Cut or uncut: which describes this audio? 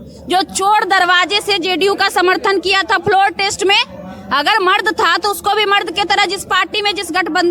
uncut